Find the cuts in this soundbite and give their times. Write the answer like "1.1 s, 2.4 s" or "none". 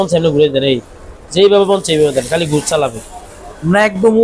none